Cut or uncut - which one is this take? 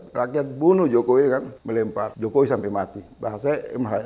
cut